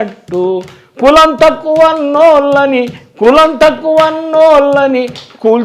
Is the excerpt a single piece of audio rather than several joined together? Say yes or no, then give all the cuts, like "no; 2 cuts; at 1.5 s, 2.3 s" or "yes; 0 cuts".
yes; 0 cuts